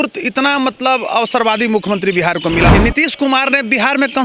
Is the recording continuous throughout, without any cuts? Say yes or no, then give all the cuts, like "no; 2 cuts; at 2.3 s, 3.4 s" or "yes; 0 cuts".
no; 1 cut; at 2.7 s